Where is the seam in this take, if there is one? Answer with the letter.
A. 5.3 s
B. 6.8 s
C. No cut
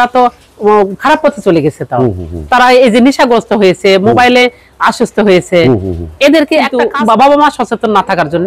B